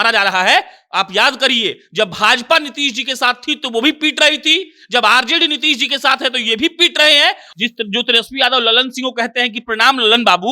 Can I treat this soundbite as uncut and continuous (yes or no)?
no